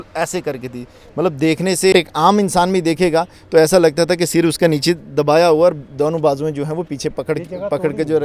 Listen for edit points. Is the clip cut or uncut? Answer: cut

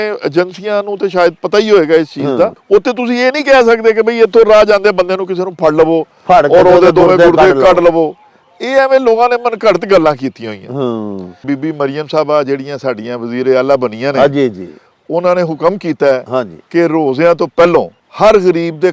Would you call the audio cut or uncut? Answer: cut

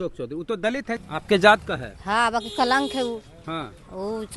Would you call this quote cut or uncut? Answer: cut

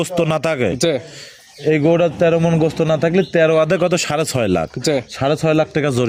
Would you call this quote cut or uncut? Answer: uncut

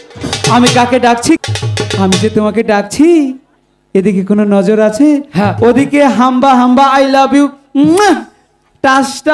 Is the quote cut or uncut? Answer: cut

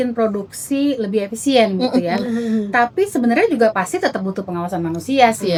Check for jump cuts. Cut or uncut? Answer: uncut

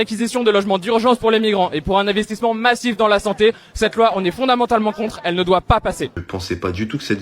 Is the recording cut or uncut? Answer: cut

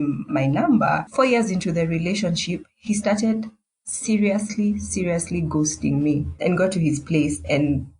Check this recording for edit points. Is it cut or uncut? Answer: cut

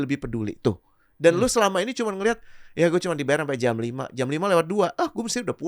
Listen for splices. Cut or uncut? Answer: uncut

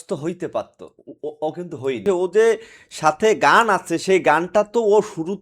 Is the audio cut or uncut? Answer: cut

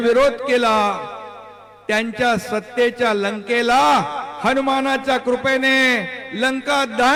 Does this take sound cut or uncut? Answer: uncut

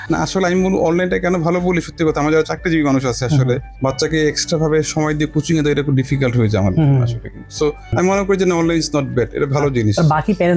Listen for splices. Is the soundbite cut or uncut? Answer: cut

